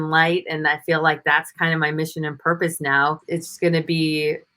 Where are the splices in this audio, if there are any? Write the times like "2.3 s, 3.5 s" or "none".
3.2 s

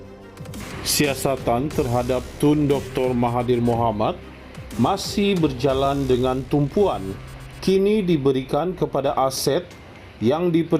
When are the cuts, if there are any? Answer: 0.9 s

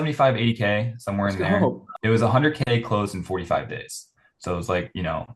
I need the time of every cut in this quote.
1.9 s

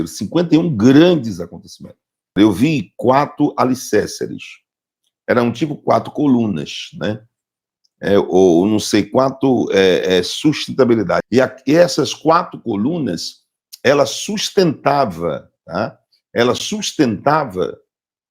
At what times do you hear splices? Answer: 2.3 s, 11.3 s

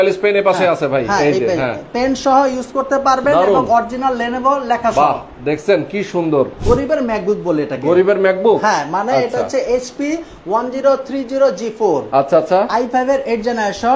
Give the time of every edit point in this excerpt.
6.6 s

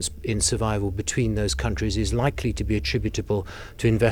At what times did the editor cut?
none

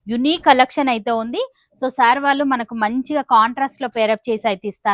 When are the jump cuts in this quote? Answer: none

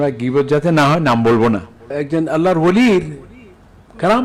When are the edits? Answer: 2.0 s

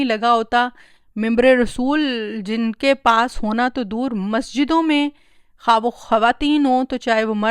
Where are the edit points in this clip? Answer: none

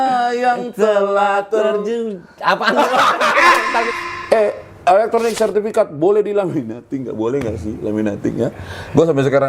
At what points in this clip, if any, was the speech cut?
3.9 s

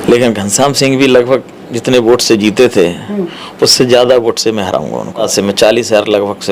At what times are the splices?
5.3 s

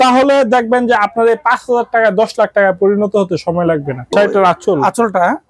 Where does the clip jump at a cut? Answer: 4.1 s

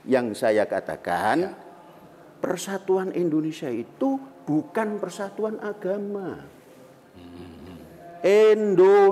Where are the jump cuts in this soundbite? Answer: none

